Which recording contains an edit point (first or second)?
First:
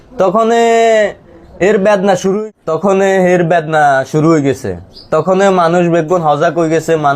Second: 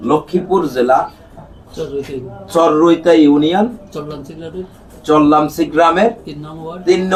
first